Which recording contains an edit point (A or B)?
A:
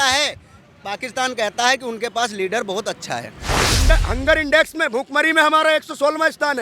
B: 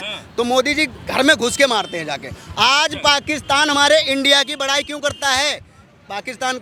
A